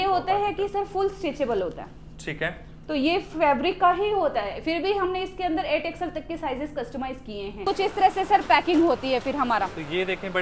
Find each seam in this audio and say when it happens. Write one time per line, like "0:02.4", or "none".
0:07.6